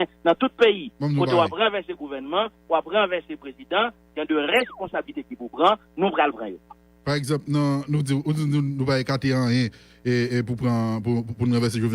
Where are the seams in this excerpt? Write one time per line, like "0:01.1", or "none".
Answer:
none